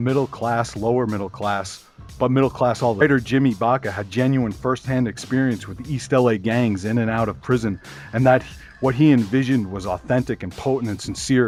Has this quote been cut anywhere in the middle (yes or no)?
no